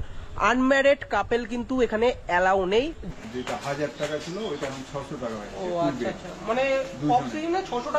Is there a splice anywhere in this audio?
yes; 1 cut; at 3.0 s

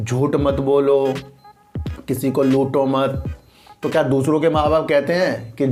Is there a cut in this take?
no; 0 cuts

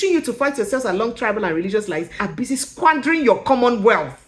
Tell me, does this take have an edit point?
yes; 1 cut; at 2.1 s

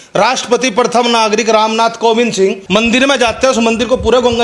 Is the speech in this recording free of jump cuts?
no; 1 cut; at 2.6 s

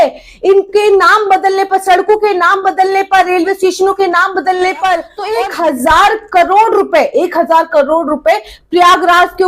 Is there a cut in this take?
yes; 1 cut; at 5.2 s

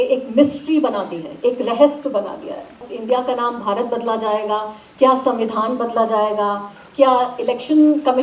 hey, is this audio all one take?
no; 1 cut; at 2.9 s

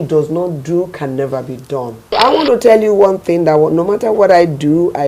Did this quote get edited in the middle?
yes; 1 cut; at 1.9 s

